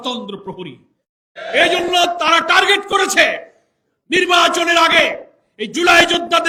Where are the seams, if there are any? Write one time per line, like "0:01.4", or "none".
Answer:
none